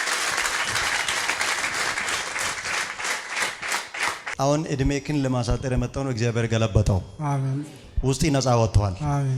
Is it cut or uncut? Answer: uncut